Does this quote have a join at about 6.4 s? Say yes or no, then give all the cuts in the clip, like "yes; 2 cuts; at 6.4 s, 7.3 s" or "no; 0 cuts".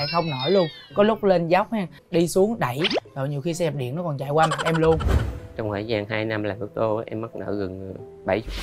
no; 2 cuts; at 2.0 s, 5.1 s